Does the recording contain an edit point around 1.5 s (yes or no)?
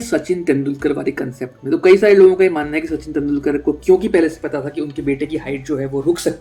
no